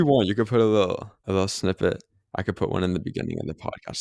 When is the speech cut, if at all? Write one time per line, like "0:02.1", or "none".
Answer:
0:01.2